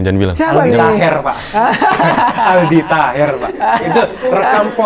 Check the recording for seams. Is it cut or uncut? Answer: uncut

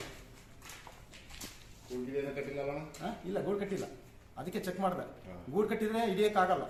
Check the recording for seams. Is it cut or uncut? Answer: uncut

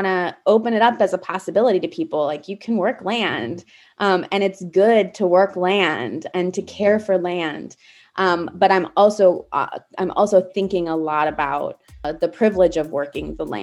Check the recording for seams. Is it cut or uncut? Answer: cut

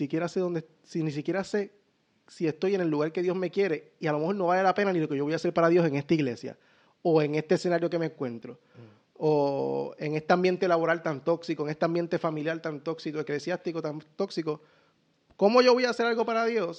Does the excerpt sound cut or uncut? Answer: uncut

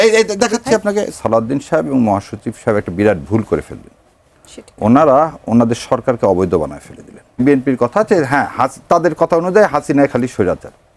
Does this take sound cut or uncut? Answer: cut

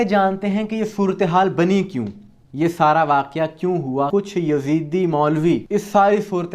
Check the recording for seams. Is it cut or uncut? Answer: cut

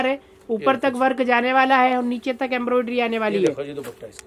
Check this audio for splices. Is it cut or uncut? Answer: uncut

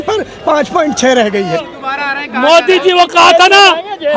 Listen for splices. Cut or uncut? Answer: cut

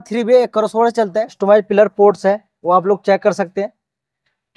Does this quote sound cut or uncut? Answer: cut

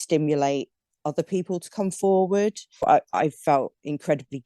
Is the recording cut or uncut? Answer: cut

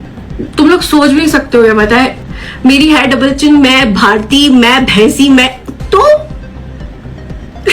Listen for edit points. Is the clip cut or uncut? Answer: cut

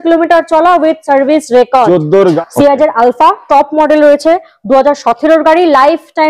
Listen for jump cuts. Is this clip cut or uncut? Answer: cut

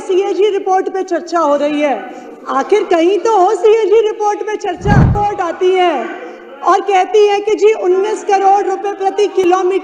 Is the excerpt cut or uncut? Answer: cut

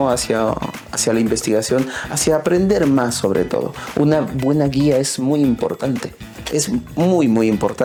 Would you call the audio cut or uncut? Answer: uncut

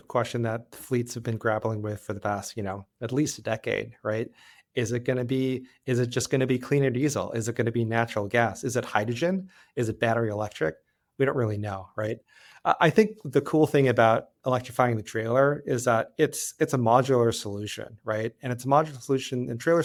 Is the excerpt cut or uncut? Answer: uncut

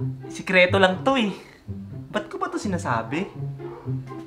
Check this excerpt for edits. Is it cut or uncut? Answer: cut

